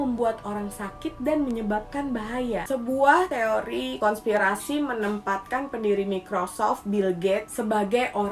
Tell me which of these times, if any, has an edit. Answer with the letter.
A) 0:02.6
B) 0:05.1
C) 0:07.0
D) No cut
A